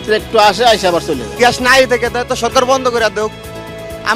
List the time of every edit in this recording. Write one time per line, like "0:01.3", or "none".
0:01.2